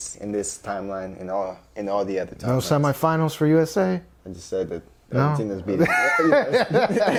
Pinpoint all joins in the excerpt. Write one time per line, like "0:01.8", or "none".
none